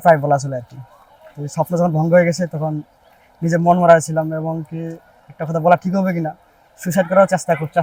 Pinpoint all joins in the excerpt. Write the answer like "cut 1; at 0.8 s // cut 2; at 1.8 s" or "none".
none